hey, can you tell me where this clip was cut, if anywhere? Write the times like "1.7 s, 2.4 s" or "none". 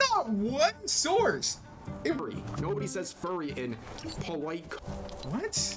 2.2 s